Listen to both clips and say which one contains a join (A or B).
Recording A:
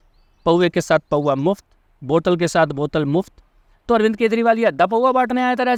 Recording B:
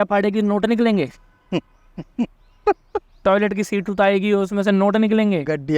B